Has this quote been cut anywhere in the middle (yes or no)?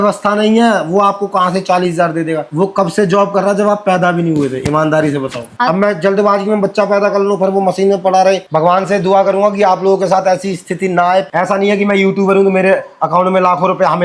yes